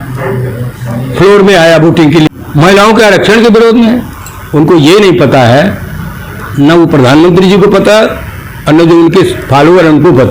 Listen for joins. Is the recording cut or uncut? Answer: cut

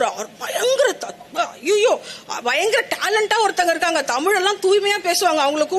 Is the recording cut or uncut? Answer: uncut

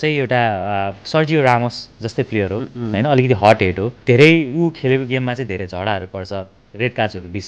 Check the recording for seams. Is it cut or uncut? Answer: cut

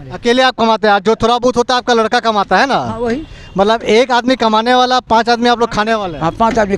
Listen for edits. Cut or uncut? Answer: uncut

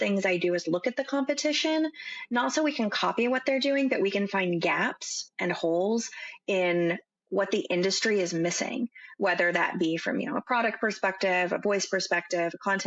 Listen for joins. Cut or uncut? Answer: uncut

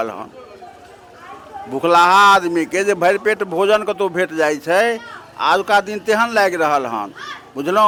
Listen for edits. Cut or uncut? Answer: uncut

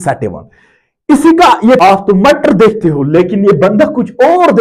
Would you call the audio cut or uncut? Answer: cut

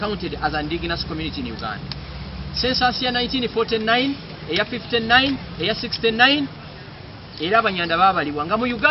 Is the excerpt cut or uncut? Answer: uncut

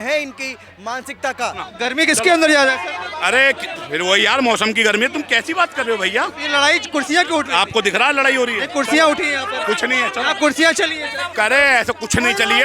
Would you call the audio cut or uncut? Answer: cut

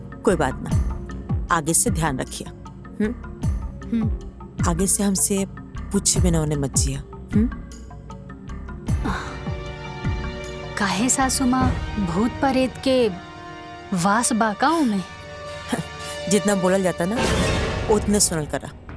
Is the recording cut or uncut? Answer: uncut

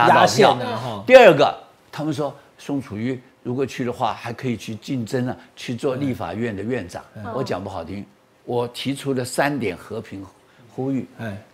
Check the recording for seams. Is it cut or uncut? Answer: uncut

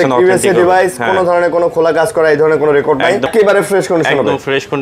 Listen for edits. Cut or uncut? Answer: cut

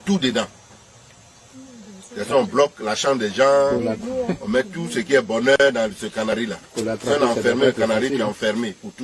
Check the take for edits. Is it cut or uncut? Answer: uncut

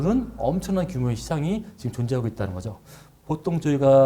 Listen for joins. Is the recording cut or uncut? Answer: cut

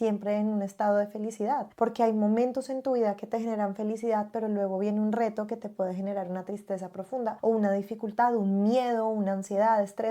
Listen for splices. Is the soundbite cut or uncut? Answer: uncut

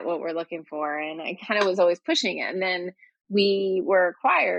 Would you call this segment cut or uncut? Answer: uncut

